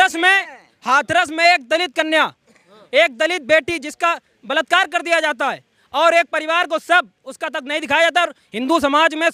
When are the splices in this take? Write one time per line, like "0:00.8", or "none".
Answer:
none